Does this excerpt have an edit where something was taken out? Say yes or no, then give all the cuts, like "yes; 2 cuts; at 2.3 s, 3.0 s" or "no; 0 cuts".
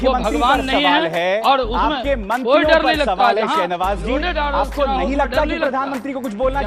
no; 0 cuts